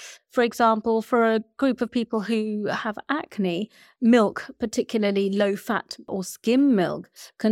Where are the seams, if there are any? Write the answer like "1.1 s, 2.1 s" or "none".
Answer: 6.1 s